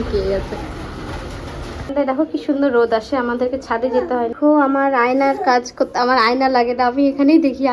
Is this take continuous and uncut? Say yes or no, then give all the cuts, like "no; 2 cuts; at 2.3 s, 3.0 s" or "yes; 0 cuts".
yes; 0 cuts